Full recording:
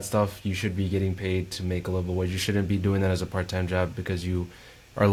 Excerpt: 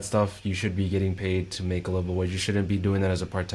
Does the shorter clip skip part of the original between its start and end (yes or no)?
no